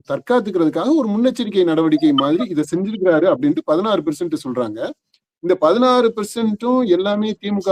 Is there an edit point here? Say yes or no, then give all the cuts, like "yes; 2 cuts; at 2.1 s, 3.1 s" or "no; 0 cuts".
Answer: no; 0 cuts